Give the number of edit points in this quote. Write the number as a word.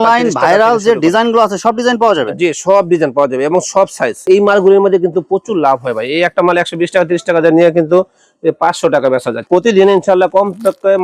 two